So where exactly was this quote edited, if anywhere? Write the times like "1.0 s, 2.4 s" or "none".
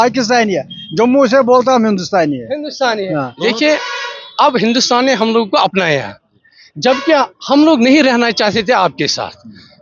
3.3 s